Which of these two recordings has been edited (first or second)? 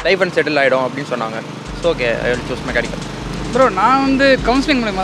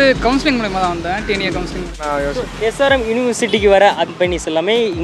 second